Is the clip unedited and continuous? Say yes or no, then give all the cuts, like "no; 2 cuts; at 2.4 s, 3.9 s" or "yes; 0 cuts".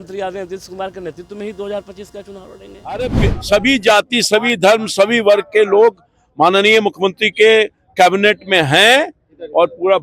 no; 1 cut; at 3.0 s